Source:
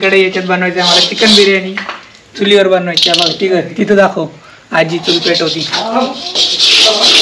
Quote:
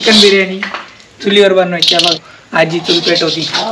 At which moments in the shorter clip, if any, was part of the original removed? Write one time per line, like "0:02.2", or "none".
0:02.2